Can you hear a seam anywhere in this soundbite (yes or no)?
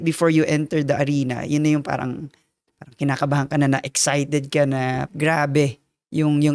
yes